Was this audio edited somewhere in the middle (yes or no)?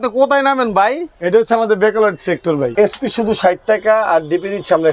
yes